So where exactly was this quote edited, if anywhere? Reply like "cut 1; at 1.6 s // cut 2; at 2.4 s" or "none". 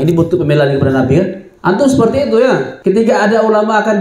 cut 1; at 1.5 s // cut 2; at 2.7 s